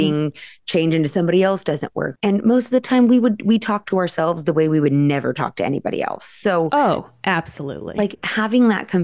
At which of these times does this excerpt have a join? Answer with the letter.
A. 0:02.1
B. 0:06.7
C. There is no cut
A